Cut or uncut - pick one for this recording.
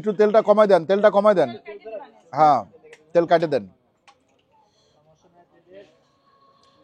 uncut